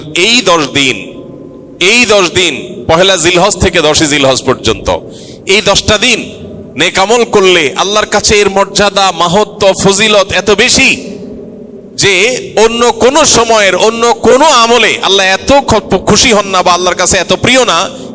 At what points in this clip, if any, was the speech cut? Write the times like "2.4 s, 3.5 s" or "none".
none